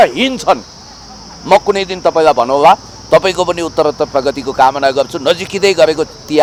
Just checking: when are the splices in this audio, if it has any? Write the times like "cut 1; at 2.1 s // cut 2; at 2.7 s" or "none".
none

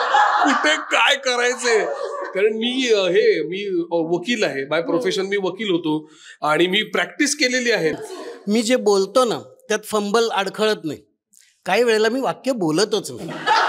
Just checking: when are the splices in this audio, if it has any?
cut 1; at 8.0 s

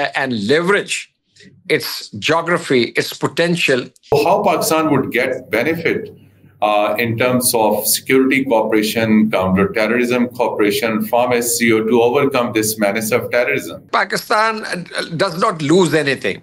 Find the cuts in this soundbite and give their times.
cut 1; at 4.1 s // cut 2; at 13.9 s

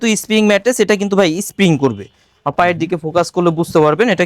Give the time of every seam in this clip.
none

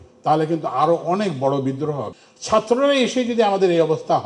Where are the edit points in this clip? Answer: cut 1; at 2.2 s

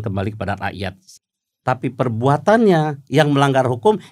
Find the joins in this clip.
cut 1; at 1.0 s

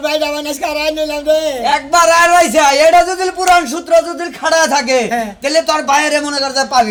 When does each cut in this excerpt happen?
none

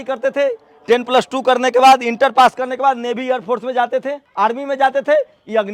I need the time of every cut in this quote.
cut 1; at 4.2 s

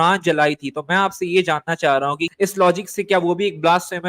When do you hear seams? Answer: cut 1; at 2.3 s

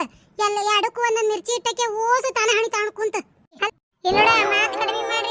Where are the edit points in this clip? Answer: cut 1; at 3.6 s

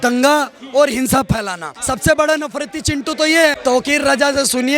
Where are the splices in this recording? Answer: cut 1; at 1.7 s // cut 2; at 3.6 s

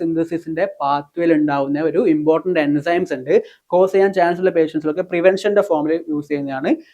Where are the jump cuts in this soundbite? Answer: cut 1; at 3.6 s

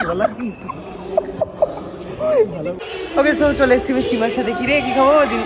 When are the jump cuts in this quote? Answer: cut 1; at 2.8 s

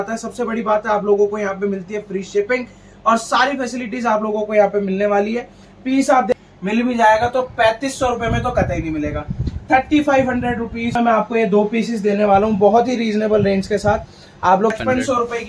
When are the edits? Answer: cut 1; at 6.3 s // cut 2; at 10.9 s // cut 3; at 14.8 s

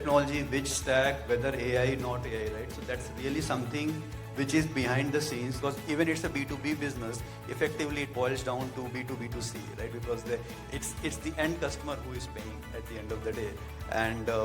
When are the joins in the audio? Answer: cut 1; at 5.5 s

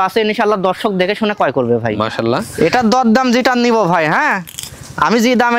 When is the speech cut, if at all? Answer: cut 1; at 2.5 s

